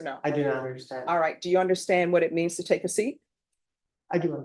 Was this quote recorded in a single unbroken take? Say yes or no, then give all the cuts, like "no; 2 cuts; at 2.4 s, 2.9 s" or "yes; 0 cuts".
yes; 0 cuts